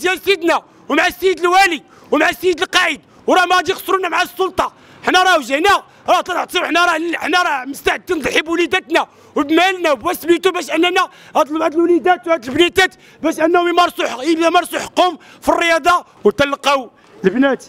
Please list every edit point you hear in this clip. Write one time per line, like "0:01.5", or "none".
0:16.1